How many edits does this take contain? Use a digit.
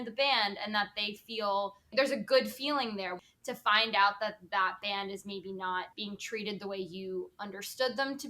3